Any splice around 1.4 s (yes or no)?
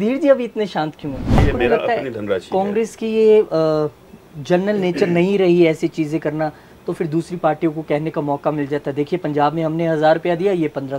yes